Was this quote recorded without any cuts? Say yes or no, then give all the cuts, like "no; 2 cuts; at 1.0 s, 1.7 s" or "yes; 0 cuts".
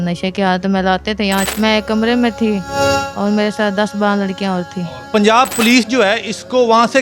no; 2 cuts; at 1.5 s, 5.0 s